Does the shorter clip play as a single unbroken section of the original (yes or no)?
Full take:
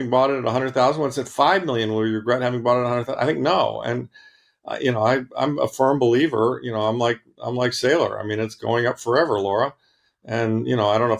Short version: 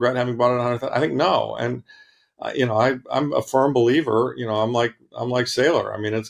yes